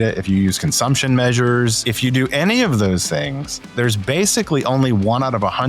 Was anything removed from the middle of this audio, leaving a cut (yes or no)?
yes